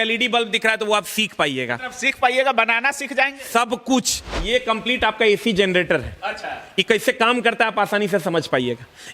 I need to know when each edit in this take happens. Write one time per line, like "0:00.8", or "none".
0:04.2

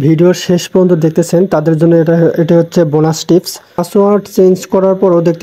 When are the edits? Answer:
0:03.8

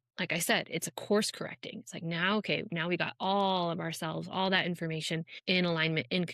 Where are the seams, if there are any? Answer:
0:05.3

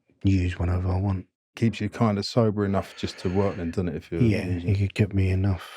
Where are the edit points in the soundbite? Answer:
0:01.4

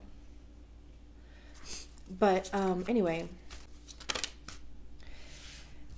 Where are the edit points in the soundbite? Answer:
0:03.7

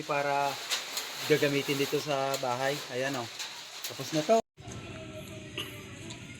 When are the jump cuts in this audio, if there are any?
0:04.4

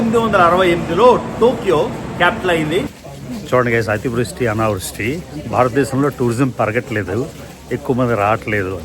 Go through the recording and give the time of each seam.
0:02.9

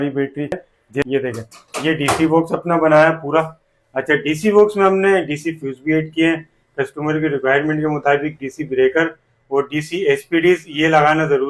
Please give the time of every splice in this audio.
0:01.1

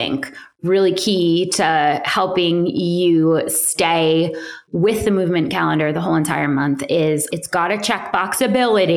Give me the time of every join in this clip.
0:07.3

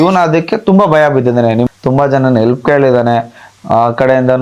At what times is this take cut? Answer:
0:01.7

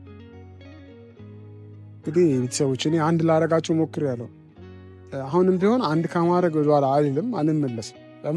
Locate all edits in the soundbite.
none

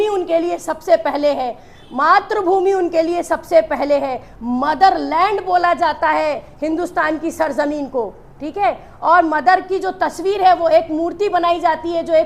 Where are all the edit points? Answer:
none

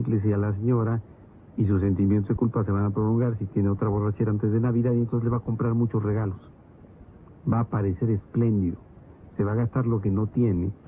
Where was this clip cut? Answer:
none

